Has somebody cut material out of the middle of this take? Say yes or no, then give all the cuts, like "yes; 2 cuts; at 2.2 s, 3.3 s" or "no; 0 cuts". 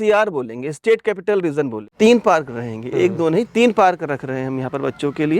yes; 1 cut; at 1.9 s